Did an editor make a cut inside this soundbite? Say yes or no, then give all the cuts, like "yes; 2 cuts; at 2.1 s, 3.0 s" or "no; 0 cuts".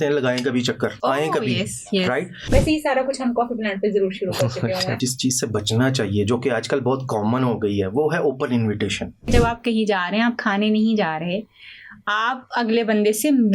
yes; 4 cuts; at 1.0 s, 2.4 s, 4.9 s, 9.3 s